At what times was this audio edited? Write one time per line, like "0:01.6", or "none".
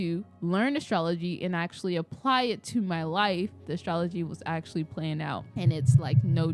0:03.7
0:05.5